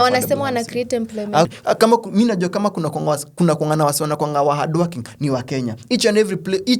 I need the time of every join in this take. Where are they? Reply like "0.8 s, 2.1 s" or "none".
1.5 s